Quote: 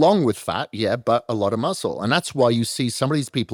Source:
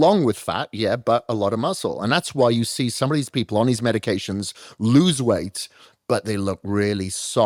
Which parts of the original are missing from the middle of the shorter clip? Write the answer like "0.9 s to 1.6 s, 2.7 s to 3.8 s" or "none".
none